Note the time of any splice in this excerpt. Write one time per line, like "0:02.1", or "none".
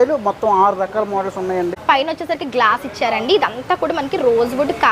0:01.7